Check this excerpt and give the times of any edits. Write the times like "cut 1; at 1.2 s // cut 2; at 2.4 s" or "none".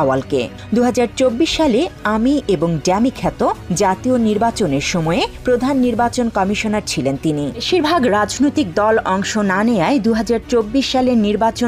cut 1; at 7.6 s